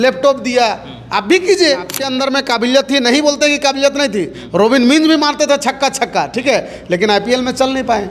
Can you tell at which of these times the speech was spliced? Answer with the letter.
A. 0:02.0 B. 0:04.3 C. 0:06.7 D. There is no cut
A